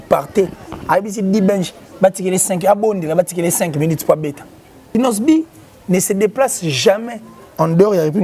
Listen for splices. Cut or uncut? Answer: cut